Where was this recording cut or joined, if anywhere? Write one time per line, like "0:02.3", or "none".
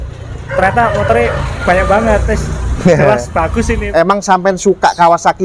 0:03.8